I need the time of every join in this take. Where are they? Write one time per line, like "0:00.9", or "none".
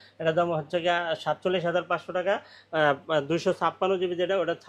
none